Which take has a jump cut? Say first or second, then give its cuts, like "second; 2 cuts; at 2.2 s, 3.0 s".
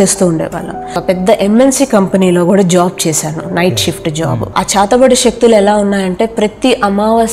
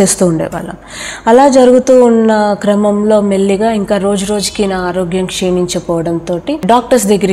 first; 2 cuts; at 0.9 s, 4.5 s